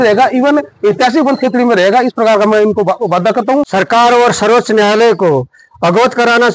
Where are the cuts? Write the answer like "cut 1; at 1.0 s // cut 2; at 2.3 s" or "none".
cut 1; at 3.7 s